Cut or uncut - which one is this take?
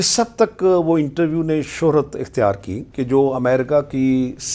cut